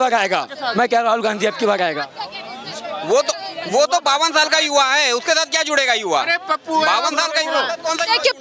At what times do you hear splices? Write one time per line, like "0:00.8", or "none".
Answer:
none